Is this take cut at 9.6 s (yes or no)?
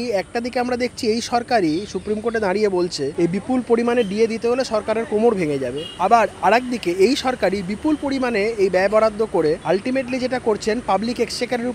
yes